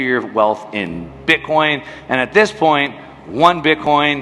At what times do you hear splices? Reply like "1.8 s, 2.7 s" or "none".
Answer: none